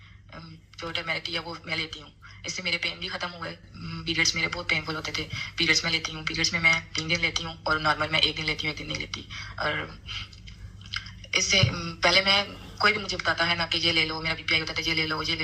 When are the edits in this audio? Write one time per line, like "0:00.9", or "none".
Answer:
none